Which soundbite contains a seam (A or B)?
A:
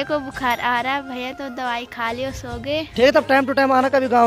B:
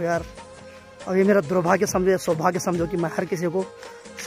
A